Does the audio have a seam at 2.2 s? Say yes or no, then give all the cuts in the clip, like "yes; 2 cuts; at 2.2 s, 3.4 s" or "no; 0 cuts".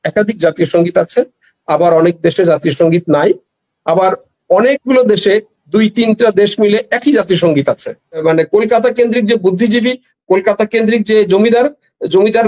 no; 1 cut; at 8.2 s